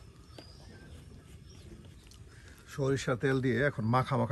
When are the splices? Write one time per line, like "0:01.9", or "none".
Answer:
0:02.0